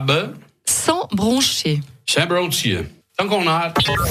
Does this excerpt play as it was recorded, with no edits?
no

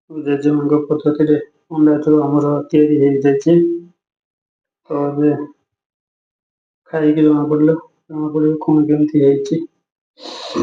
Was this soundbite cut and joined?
no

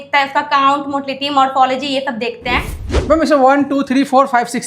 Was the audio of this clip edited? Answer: yes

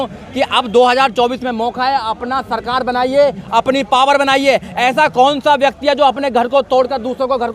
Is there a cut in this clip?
no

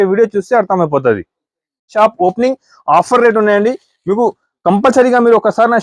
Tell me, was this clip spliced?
yes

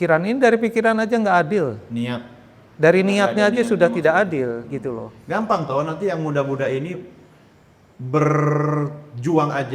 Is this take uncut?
yes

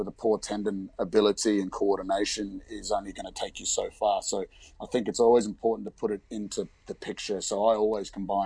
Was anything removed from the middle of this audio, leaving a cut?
no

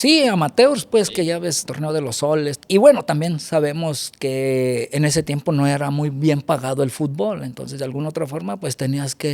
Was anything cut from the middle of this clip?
yes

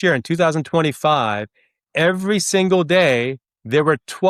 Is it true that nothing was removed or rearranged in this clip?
yes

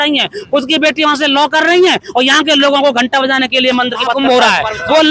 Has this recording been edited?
yes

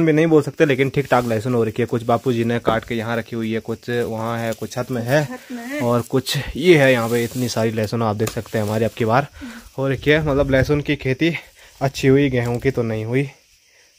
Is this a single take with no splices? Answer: yes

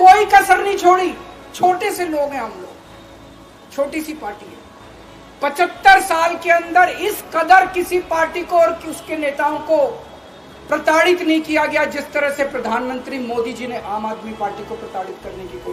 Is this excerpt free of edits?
yes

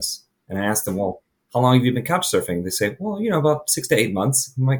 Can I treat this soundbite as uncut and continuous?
yes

